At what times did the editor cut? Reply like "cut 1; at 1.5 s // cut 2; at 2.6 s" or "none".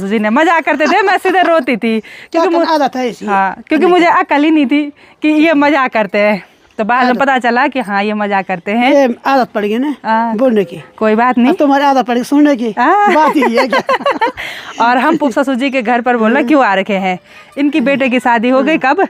none